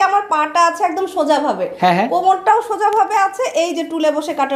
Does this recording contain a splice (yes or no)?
no